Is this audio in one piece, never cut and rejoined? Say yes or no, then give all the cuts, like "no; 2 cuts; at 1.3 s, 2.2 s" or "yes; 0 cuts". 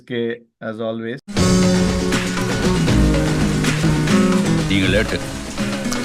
yes; 0 cuts